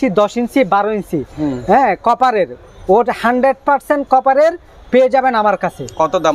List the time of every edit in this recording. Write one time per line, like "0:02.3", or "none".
none